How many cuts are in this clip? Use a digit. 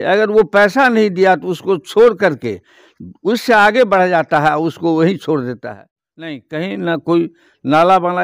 1